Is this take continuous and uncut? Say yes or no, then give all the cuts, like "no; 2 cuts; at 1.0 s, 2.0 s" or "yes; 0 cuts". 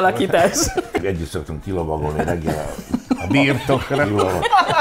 no; 1 cut; at 1.0 s